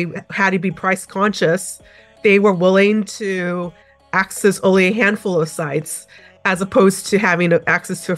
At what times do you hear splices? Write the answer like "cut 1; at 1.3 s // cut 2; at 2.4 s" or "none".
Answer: none